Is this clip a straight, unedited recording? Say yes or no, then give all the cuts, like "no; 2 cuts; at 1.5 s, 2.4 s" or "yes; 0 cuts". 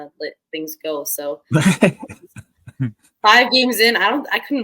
yes; 0 cuts